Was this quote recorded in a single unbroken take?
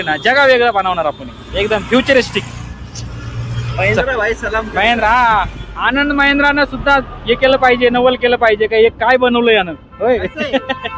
yes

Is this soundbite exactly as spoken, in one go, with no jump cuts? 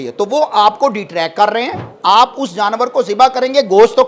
no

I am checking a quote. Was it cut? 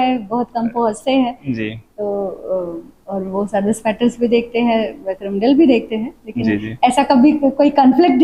no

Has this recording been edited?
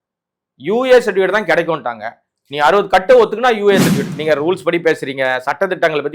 yes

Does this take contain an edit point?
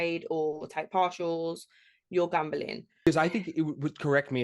yes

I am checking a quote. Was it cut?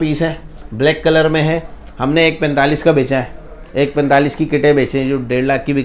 no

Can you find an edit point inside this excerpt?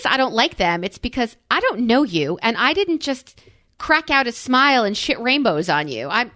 no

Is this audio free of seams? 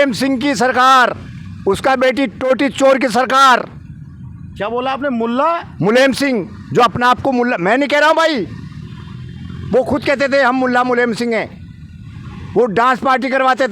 yes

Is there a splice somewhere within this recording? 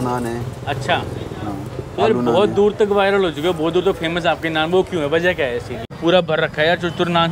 yes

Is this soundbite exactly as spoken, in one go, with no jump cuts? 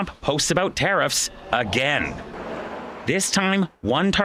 yes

